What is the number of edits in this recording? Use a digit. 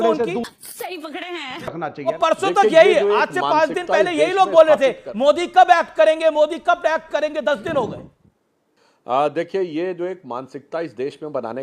1